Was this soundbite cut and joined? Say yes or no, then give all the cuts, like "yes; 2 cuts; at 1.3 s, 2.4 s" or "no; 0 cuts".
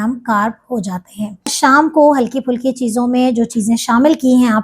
yes; 1 cut; at 1.5 s